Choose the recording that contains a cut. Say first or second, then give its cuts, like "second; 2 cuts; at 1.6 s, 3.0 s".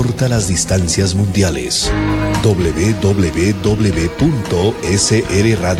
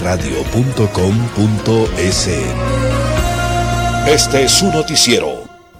second; 1 cut; at 4.0 s